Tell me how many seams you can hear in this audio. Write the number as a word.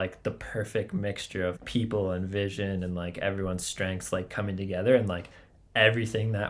one